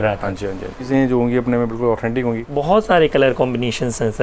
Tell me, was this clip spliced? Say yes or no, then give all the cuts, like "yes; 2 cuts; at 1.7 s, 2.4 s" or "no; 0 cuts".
yes; 2 cuts; at 0.9 s, 2.5 s